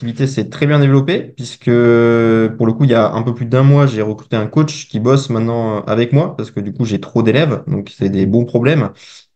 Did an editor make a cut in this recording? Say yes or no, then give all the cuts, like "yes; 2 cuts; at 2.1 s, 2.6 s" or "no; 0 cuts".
no; 0 cuts